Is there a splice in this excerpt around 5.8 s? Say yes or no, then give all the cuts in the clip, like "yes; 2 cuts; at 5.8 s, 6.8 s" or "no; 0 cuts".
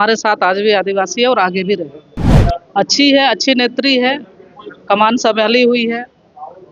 no; 1 cut; at 2.3 s